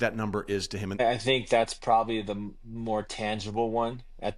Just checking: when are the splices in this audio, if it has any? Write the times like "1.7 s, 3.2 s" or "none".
1.0 s